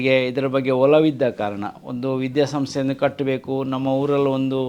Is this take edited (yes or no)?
no